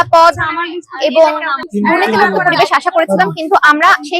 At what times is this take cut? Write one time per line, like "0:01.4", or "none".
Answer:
0:01.6